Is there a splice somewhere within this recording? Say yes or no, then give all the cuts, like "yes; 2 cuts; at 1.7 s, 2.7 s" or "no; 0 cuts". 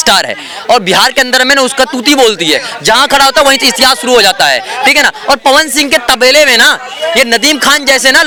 no; 0 cuts